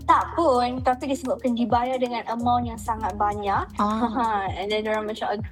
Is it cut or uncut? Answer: uncut